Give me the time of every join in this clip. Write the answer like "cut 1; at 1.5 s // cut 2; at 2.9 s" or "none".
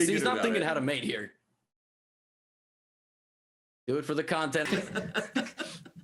cut 1; at 4.7 s